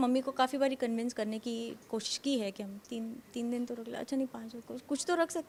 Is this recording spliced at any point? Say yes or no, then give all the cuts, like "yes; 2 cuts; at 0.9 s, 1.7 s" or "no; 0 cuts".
no; 0 cuts